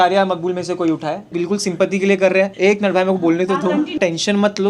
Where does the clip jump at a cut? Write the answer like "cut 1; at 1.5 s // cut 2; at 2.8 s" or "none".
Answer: cut 1; at 1.3 s // cut 2; at 2.5 s // cut 3; at 4.0 s